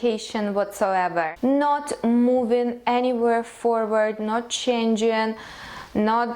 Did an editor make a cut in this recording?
yes; 1 cut; at 1.3 s

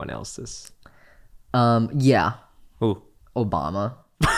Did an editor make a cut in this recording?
no; 0 cuts

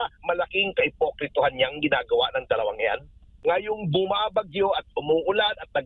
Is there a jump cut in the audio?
yes; 1 cut; at 3.2 s

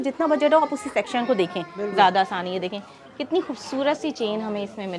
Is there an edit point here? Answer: no; 0 cuts

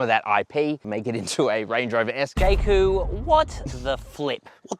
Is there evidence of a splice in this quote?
yes; 1 cut; at 2.3 s

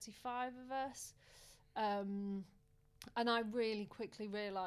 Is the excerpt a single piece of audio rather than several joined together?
yes; 0 cuts

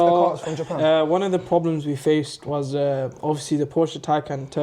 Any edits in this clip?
no; 0 cuts

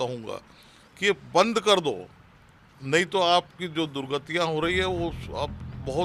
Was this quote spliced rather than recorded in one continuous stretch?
no; 0 cuts

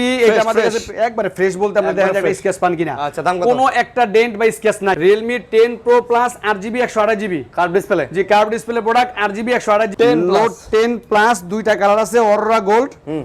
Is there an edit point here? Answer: yes; 2 cuts; at 5.0 s, 9.9 s

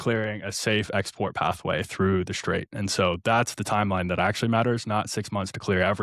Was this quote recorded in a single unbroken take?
yes; 0 cuts

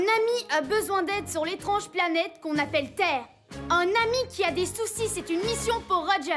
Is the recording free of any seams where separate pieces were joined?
yes; 0 cuts

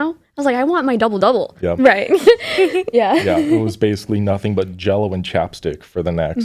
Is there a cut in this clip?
no; 0 cuts

